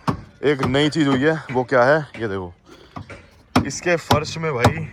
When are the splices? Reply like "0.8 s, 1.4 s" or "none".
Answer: none